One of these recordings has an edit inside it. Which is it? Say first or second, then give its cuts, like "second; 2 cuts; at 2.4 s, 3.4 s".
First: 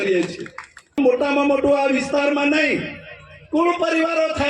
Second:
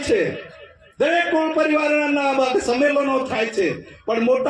first; 1 cut; at 1.0 s